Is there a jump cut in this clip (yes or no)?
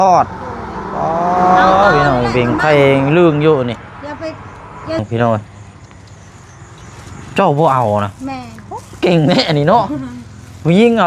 yes